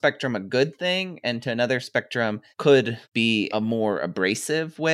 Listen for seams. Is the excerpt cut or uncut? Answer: uncut